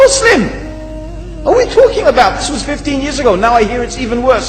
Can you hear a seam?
no; 0 cuts

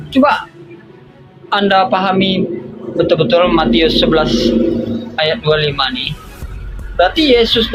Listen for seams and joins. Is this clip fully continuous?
yes; 0 cuts

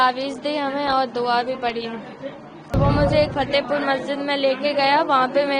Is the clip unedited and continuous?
no; 1 cut; at 2.8 s

